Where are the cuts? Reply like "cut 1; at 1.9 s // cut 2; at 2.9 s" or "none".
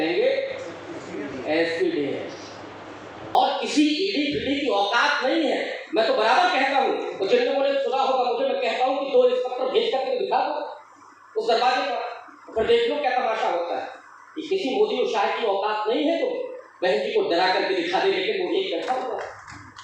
cut 1; at 3.3 s